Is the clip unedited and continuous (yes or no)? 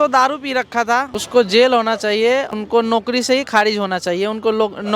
no